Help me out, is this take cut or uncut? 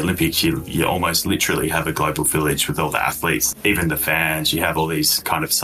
cut